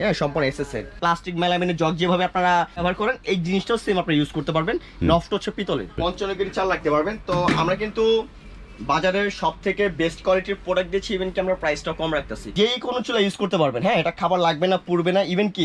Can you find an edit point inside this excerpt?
yes; 4 cuts; at 0.9 s, 2.8 s, 5.9 s, 12.5 s

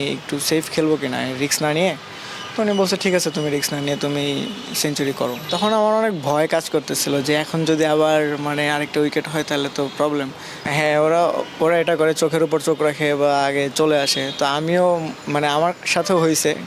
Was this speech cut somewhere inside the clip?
yes; 2 cuts; at 5.4 s, 10.6 s

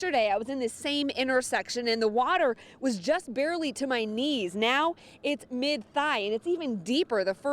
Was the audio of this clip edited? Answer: no; 0 cuts

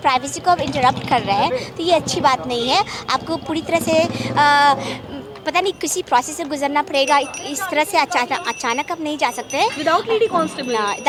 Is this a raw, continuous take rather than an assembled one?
yes; 0 cuts

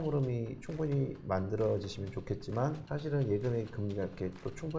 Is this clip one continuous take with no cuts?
no; 1 cut; at 2.8 s

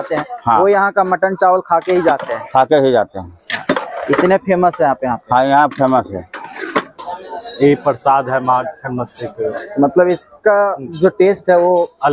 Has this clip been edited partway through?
yes; 1 cut; at 6.8 s

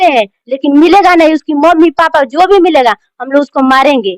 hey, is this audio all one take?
yes; 0 cuts

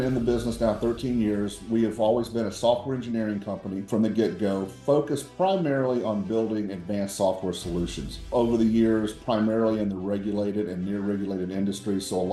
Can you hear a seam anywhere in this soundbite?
yes; 2 cuts; at 3.8 s, 8.3 s

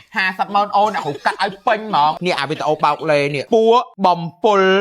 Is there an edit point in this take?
yes; 3 cuts; at 2.2 s, 3.4 s, 3.9 s

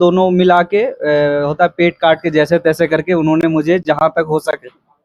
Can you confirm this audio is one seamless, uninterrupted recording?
yes; 0 cuts

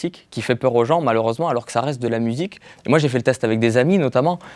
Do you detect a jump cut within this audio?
no; 0 cuts

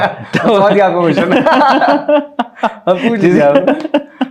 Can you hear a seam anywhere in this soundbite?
no; 0 cuts

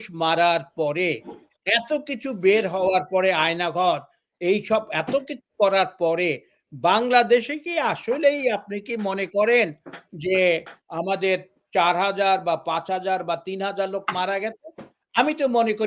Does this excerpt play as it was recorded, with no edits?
yes; 0 cuts

